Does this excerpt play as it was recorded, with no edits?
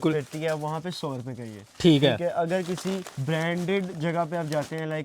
no; 1 cut; at 3.1 s

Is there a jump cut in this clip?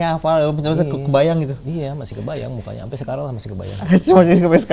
no; 0 cuts

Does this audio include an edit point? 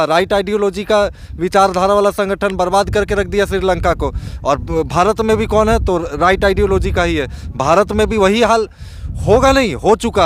no; 0 cuts

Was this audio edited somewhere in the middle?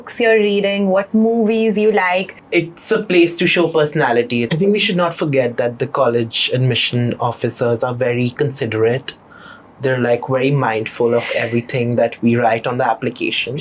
yes; 2 cuts; at 2.3 s, 4.5 s

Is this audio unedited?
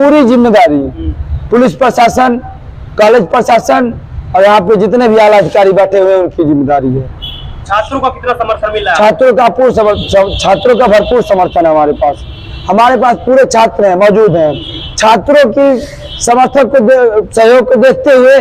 yes; 0 cuts

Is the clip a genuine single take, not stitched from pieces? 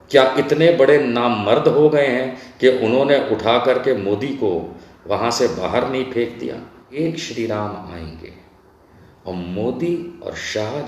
no; 1 cut; at 6.8 s

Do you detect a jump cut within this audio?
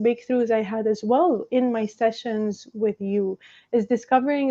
no; 0 cuts

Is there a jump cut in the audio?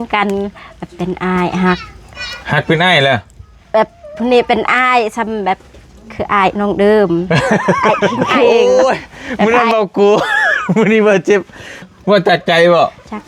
yes; 2 cuts; at 8.5 s, 11.9 s

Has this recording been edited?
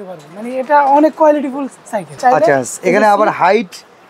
yes; 1 cut; at 2.0 s

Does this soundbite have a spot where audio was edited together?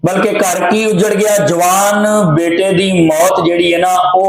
no; 0 cuts

